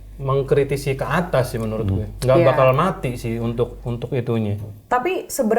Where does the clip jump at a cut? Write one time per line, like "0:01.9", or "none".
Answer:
none